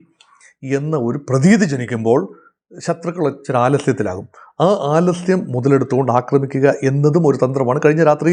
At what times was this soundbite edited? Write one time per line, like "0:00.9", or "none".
none